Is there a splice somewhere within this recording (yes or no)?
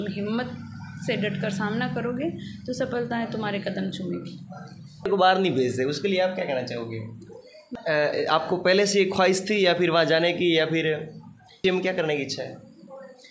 yes